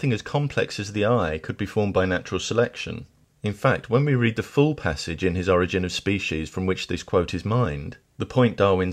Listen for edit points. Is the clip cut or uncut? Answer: uncut